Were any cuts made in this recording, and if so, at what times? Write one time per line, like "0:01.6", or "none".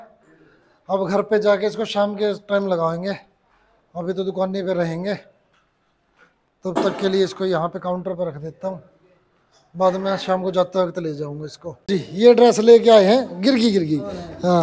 none